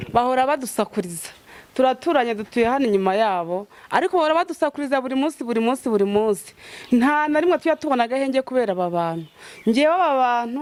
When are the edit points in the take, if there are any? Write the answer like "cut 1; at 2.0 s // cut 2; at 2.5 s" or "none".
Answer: none